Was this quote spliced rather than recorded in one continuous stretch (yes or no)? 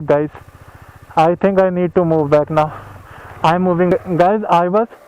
no